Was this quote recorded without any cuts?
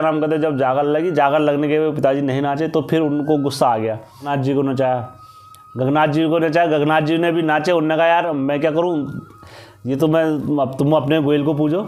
no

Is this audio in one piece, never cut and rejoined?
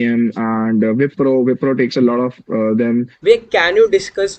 no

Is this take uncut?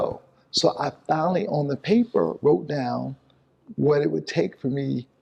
yes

